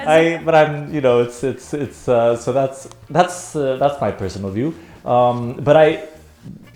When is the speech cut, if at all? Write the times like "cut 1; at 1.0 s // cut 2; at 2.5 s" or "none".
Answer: none

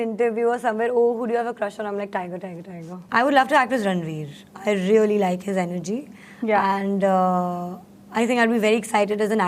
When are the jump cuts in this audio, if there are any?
cut 1; at 2.9 s

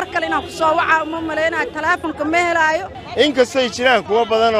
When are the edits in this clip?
cut 1; at 3.0 s

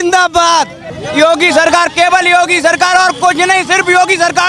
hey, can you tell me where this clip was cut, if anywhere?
none

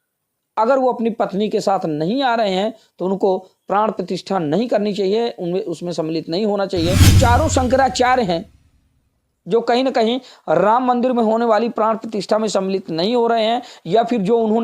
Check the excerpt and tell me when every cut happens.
cut 1; at 7.2 s

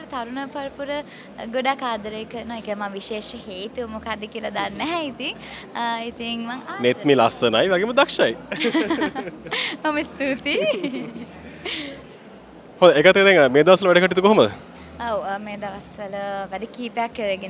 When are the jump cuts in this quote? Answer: none

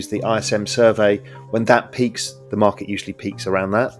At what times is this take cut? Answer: none

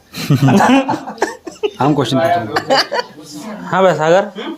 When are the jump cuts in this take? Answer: cut 1; at 3.5 s

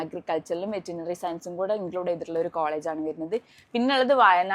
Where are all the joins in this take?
none

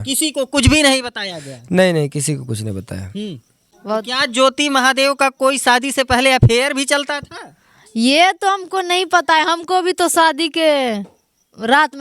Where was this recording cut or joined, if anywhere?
cut 1; at 3.7 s

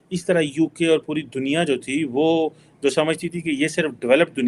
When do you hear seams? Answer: none

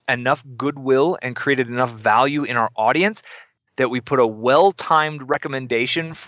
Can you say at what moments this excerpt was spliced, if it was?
cut 1; at 5.3 s

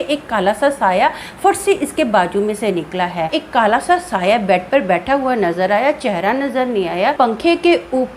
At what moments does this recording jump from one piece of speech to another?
cut 1; at 3.3 s // cut 2; at 7.2 s

